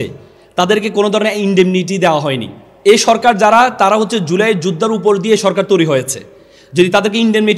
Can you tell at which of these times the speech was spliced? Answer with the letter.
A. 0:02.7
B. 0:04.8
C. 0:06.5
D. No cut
A